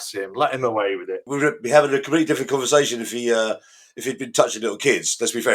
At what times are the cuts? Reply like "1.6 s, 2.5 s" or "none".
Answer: 1.2 s